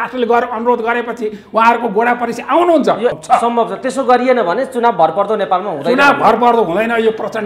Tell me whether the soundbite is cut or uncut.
cut